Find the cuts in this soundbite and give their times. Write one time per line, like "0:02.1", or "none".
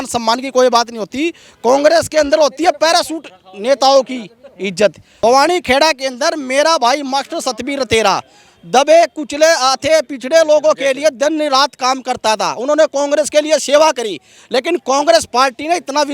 0:05.1